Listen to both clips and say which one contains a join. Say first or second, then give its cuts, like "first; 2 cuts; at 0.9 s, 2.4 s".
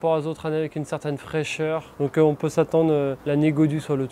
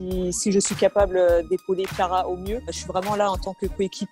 first; 2 cuts; at 1.9 s, 3.2 s